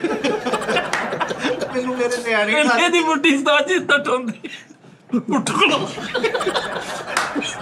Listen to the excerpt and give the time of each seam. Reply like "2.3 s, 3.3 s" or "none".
1.7 s